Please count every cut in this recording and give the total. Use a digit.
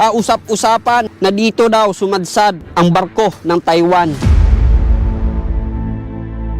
1